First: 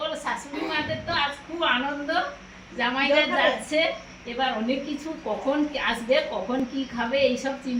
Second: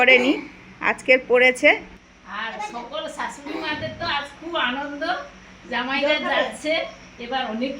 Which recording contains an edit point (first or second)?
second